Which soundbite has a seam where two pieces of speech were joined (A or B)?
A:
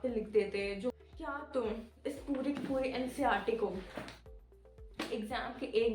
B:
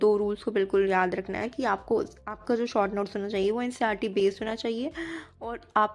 A